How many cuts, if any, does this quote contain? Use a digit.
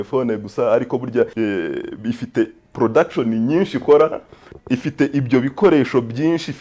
2